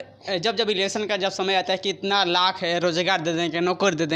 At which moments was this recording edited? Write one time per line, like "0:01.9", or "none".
none